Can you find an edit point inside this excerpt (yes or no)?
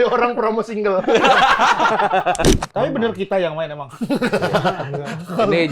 yes